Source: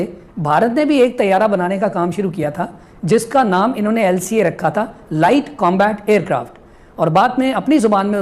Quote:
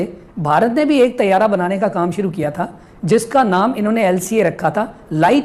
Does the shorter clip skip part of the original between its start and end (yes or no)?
no